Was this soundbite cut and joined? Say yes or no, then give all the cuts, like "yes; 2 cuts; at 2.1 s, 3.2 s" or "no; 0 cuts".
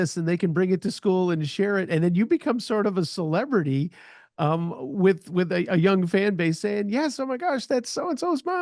no; 0 cuts